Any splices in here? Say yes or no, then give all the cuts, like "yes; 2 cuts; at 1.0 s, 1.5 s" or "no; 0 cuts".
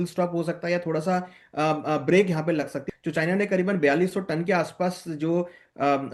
yes; 1 cut; at 2.8 s